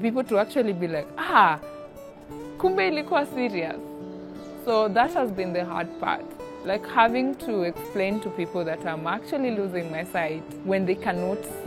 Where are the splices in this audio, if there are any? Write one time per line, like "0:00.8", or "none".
0:10.5